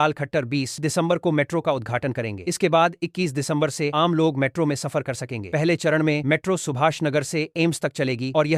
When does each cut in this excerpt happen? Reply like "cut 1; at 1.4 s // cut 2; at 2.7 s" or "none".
none